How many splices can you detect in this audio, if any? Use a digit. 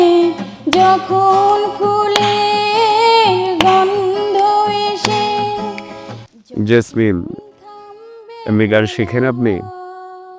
1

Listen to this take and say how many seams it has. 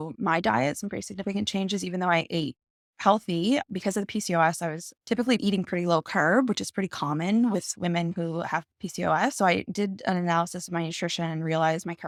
0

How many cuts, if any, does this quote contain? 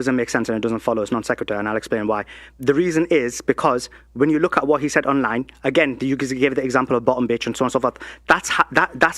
1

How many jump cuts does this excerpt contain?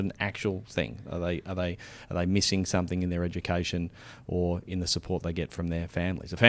0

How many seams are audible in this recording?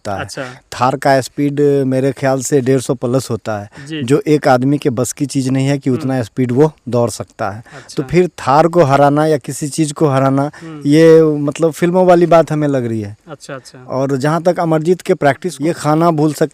1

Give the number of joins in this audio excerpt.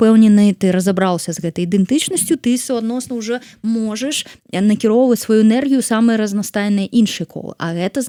0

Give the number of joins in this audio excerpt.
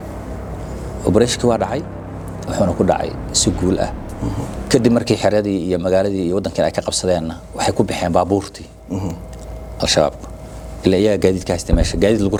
0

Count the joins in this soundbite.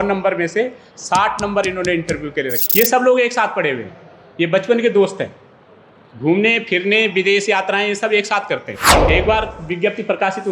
2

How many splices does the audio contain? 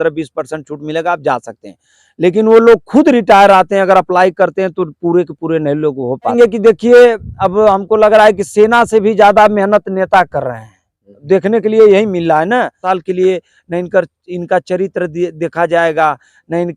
2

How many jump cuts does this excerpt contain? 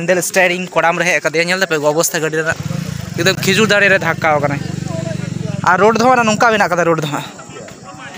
0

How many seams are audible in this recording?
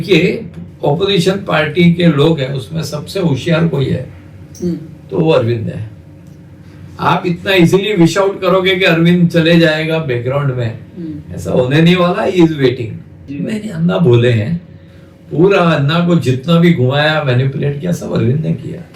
1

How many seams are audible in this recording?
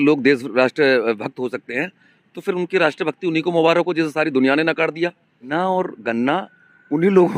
1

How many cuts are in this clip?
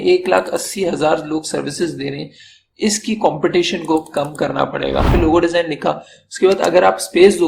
1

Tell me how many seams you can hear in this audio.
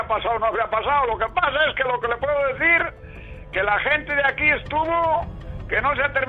0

